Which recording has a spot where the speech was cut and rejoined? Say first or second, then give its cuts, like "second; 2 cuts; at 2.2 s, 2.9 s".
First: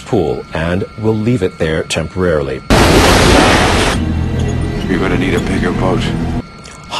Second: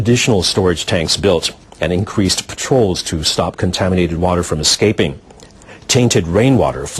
second; 1 cut; at 2.0 s